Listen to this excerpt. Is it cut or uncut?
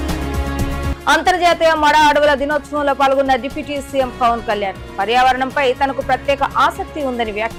uncut